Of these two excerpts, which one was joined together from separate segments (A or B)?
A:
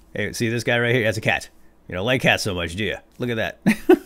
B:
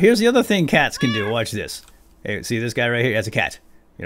A